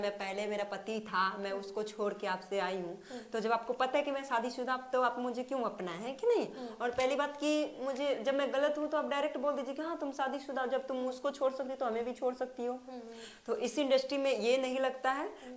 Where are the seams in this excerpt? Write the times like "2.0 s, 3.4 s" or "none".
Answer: none